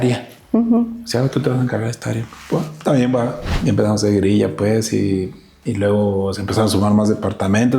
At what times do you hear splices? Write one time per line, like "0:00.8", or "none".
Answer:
0:03.5